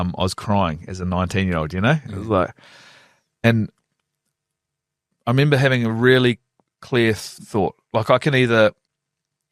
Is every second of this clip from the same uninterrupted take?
no; 1 cut; at 7.3 s

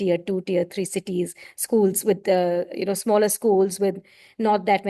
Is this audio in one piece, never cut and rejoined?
yes; 0 cuts

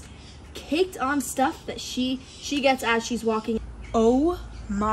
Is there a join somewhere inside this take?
yes; 1 cut; at 3.6 s

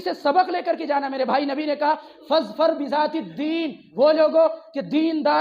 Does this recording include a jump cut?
yes; 1 cut; at 3.8 s

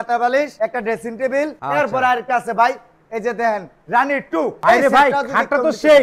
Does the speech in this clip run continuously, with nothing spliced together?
no; 2 cuts; at 1.6 s, 4.6 s

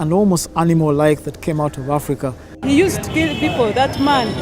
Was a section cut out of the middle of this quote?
yes; 1 cut; at 2.5 s

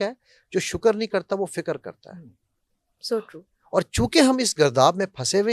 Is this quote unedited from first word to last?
yes; 0 cuts

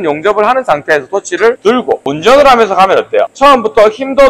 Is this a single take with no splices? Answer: no; 2 cuts; at 1.8 s, 3.3 s

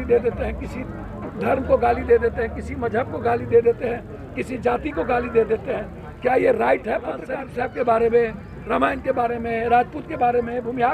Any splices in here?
yes; 1 cut; at 7.3 s

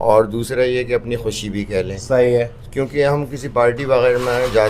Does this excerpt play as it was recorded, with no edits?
yes; 0 cuts

